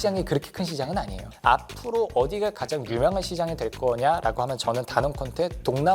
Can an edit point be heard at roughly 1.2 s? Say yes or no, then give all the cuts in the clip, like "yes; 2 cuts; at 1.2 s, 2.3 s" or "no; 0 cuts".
yes; 1 cut; at 1.2 s